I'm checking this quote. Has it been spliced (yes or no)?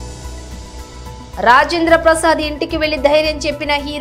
yes